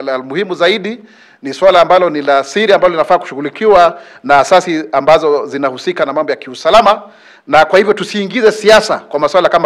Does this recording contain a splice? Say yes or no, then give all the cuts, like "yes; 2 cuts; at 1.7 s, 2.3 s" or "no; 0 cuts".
no; 0 cuts